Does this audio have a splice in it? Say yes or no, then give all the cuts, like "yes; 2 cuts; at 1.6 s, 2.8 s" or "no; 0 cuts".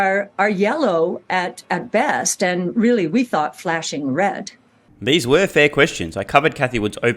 no; 0 cuts